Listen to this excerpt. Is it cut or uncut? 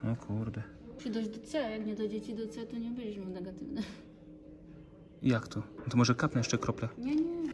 cut